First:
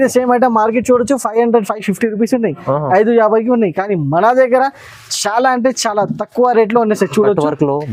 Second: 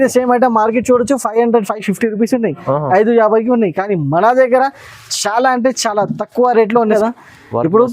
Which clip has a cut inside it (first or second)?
second